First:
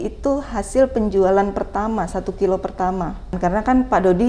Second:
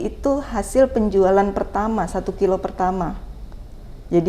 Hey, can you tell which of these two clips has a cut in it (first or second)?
first